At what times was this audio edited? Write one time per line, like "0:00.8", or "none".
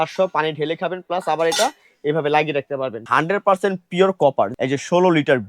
0:03.0
0:04.5